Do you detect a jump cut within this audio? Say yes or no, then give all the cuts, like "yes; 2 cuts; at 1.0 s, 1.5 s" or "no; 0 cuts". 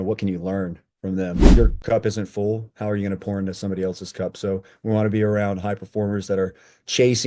yes; 1 cut; at 1.5 s